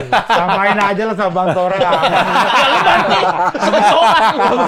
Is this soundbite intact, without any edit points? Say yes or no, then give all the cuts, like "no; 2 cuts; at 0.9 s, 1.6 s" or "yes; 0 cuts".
yes; 0 cuts